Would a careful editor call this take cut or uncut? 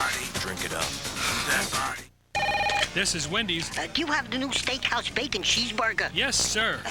cut